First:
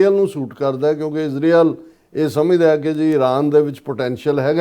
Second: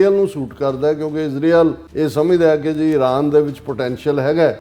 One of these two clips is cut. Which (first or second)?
second